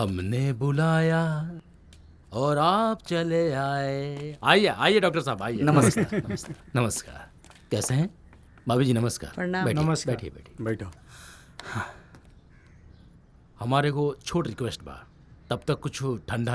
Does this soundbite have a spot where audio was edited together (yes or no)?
no